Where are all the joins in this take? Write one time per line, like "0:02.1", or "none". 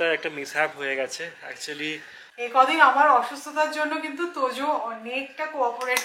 0:02.2